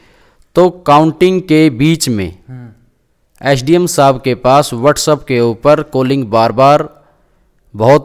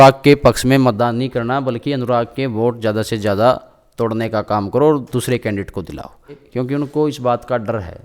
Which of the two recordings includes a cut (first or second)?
second